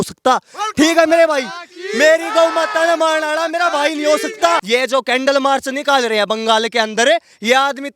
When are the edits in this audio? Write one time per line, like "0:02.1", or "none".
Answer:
0:04.6